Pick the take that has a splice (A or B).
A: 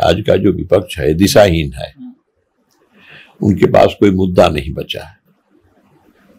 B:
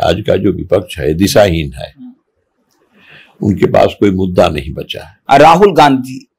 B